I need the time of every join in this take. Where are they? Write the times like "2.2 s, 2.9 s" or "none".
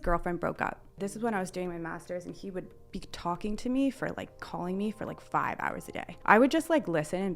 0.9 s, 6.1 s